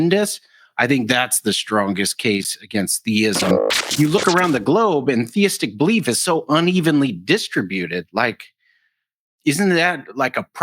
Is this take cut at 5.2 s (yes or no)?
no